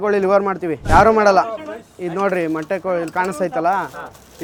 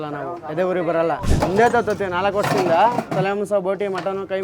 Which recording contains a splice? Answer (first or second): second